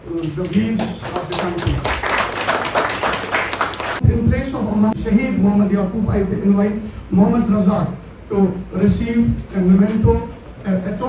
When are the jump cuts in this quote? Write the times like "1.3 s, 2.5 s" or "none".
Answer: 4.0 s, 4.9 s